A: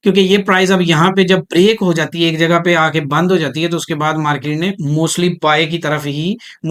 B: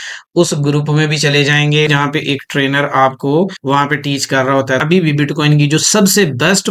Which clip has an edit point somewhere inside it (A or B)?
B